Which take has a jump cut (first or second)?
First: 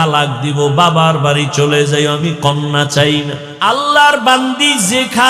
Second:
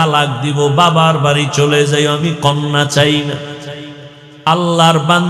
first